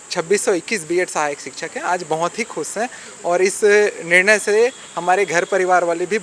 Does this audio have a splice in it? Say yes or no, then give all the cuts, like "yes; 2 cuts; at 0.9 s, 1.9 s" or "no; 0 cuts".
no; 0 cuts